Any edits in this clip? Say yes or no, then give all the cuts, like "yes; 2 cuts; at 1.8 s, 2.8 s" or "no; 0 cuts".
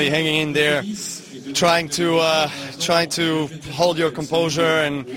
no; 0 cuts